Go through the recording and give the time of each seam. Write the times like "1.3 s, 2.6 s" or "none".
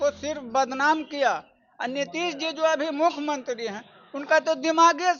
none